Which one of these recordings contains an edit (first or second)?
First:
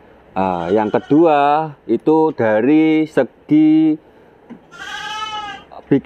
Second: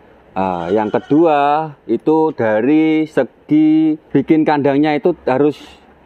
second